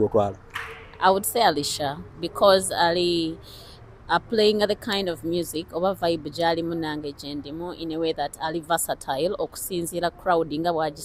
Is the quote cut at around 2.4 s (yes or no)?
no